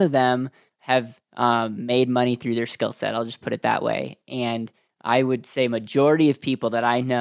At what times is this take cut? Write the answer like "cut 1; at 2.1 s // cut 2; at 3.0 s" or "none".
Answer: none